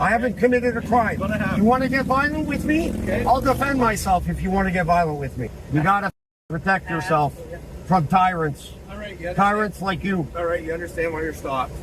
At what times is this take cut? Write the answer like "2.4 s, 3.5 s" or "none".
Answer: 5.6 s